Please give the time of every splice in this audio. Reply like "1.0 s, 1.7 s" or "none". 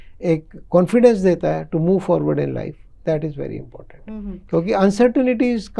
none